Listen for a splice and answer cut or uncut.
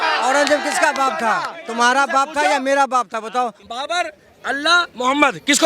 cut